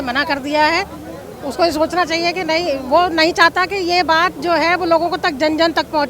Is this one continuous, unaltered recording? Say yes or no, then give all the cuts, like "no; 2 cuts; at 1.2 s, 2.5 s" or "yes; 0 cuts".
yes; 0 cuts